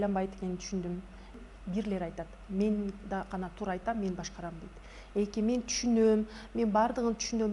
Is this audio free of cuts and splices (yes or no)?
no